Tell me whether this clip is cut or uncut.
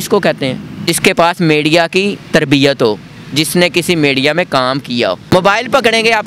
cut